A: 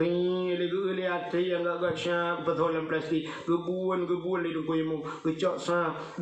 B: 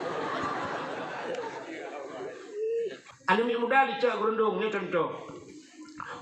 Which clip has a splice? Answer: B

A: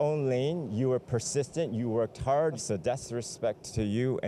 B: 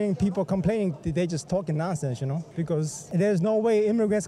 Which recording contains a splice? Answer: A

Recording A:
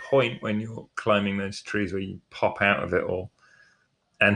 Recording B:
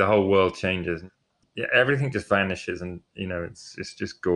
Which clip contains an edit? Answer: B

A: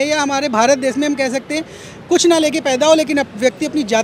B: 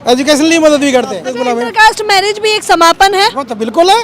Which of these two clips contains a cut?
B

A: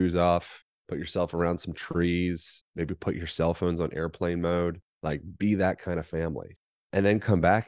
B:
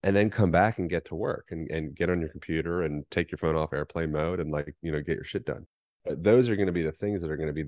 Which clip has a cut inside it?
B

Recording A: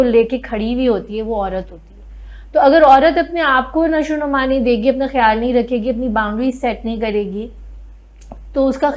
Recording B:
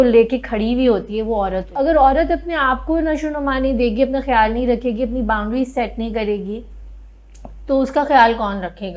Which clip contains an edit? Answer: B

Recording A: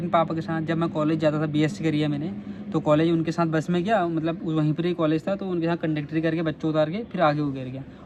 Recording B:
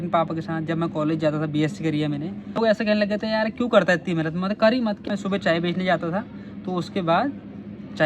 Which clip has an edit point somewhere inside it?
B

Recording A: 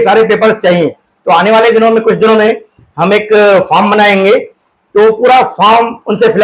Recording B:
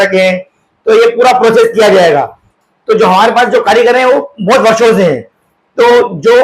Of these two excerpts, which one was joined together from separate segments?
B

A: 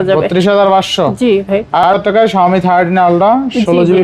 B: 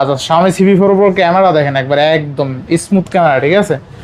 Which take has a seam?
A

